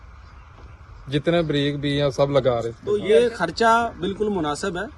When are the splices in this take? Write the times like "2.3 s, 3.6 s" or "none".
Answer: 2.8 s